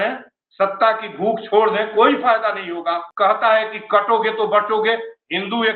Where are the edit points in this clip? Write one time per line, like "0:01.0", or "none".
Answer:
0:03.1